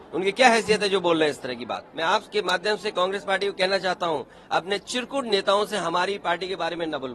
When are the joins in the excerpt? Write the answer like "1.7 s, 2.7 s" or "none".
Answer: 1.8 s